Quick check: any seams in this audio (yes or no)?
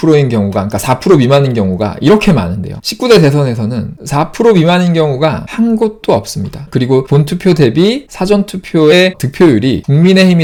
no